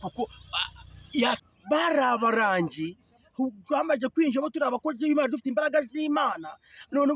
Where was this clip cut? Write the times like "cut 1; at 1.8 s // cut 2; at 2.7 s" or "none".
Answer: cut 1; at 1.4 s